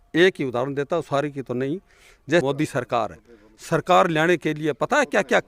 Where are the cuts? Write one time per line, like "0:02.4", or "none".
0:02.4